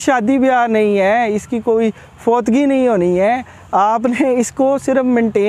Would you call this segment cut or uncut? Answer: uncut